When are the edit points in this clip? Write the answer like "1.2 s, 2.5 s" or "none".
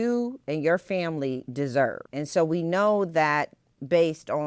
2.0 s